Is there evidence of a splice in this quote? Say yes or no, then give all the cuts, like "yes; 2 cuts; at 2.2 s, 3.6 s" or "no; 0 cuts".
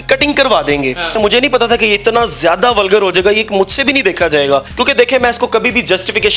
yes; 2 cuts; at 1.2 s, 4.7 s